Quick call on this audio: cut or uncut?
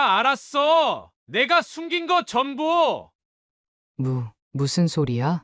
cut